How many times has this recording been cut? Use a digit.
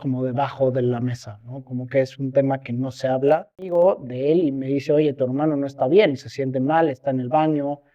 1